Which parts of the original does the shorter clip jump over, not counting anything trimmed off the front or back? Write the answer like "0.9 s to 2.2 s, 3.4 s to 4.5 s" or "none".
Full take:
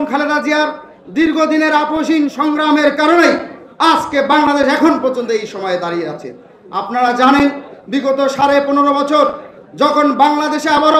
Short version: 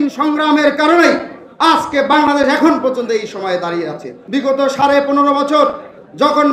6.3 s to 7.7 s